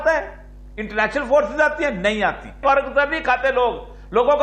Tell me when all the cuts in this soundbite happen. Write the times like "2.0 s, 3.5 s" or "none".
2.6 s